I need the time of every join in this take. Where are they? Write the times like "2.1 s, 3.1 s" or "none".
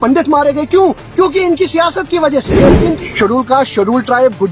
2.6 s